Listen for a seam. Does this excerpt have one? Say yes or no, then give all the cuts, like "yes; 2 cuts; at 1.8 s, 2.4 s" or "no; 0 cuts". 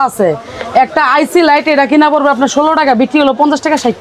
no; 0 cuts